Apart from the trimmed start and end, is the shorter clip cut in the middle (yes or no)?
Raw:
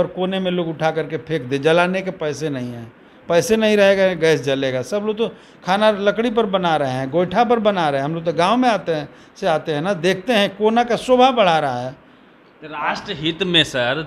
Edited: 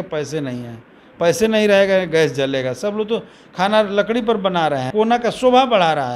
yes